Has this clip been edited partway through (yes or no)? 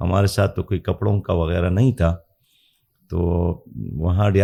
no